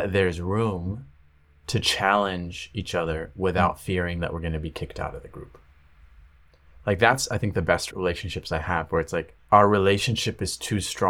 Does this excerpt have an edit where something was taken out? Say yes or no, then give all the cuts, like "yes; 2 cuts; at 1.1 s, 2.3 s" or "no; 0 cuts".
yes; 2 cuts; at 7.9 s, 9.3 s